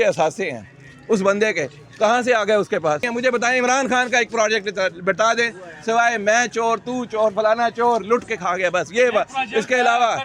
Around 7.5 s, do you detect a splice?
no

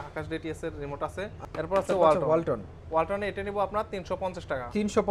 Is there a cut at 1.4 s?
yes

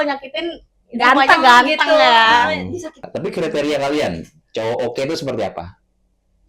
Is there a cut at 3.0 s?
yes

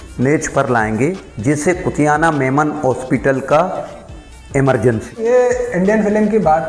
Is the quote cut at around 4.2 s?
no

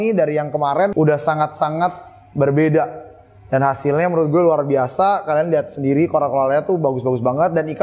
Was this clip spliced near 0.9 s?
yes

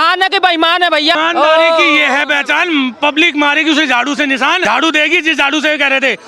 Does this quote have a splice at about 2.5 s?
no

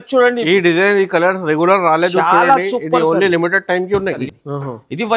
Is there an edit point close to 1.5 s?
no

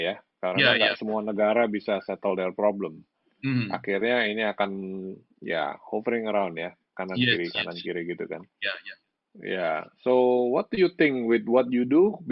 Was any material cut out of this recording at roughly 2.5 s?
no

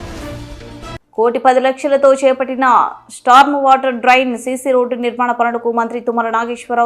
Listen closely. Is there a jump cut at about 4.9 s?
no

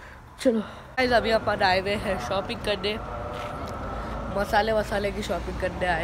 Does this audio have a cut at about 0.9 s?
yes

